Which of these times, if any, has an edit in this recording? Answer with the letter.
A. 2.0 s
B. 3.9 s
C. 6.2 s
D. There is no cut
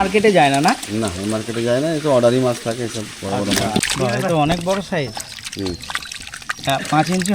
B